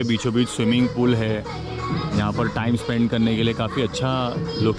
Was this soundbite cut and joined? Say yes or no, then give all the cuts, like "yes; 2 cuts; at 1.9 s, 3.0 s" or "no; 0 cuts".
no; 0 cuts